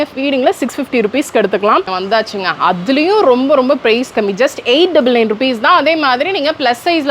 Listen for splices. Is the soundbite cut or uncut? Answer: cut